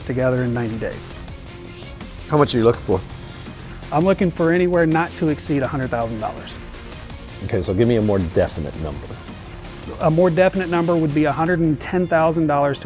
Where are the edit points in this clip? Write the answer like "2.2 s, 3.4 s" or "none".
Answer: 9.6 s